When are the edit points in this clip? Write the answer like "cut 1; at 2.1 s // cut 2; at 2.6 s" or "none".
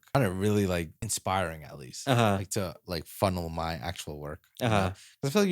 cut 1; at 1.1 s